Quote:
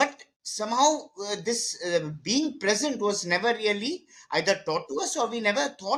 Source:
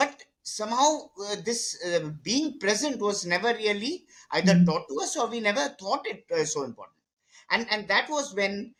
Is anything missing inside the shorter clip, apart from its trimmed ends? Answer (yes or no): no